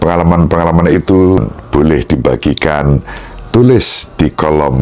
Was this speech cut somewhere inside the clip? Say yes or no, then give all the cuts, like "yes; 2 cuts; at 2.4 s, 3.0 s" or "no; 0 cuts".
yes; 1 cut; at 1.4 s